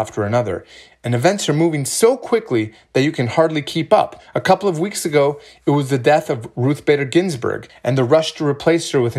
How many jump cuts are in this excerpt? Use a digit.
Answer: 2